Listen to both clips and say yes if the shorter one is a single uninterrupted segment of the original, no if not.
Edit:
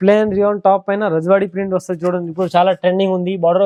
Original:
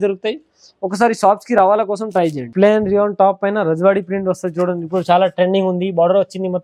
yes